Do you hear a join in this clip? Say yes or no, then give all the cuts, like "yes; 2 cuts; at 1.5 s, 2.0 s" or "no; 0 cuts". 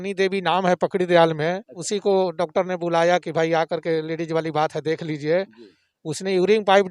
yes; 1 cut; at 1.8 s